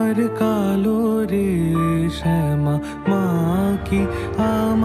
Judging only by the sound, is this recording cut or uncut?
uncut